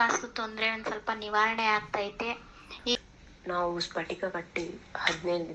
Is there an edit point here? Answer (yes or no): yes